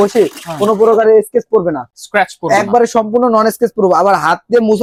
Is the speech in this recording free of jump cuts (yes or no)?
yes